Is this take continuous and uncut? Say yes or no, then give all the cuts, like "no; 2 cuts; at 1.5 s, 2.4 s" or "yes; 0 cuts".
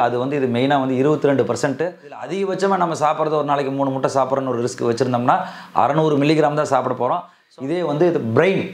no; 2 cuts; at 2.2 s, 7.4 s